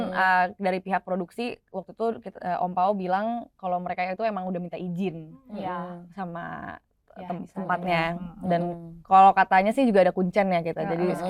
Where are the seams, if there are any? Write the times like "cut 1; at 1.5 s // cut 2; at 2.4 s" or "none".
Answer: none